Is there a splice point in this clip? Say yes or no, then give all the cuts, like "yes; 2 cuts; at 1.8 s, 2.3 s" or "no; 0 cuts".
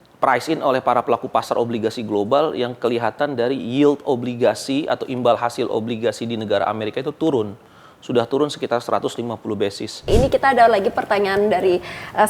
yes; 1 cut; at 10.1 s